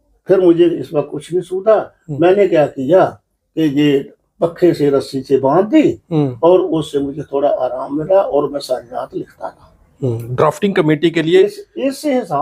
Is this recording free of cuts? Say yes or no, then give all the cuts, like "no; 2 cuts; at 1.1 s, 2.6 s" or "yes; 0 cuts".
yes; 0 cuts